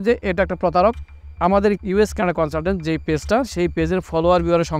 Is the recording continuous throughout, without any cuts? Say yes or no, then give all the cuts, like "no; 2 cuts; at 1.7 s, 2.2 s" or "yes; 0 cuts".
no; 1 cut; at 1.3 s